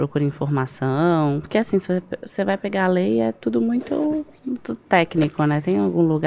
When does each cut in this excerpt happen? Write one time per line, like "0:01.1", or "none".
none